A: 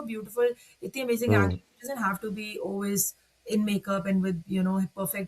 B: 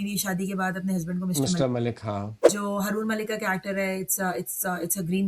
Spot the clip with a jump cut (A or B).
B